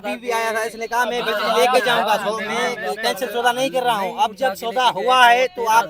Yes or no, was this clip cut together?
no